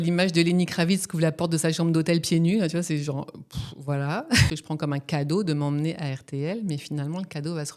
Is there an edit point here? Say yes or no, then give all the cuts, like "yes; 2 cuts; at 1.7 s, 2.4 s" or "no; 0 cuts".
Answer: yes; 1 cut; at 4.5 s